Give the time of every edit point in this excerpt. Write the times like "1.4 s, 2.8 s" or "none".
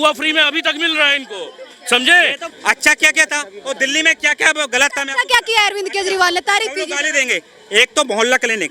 2.4 s